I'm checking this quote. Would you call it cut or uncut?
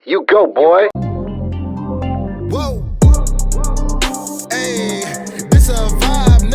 cut